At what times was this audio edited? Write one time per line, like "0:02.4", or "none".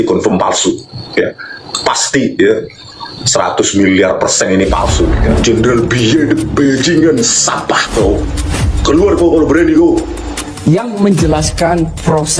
0:05.3